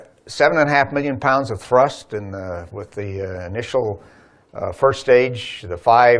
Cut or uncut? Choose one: uncut